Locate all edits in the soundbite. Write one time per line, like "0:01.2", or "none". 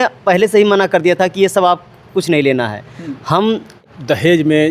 0:03.8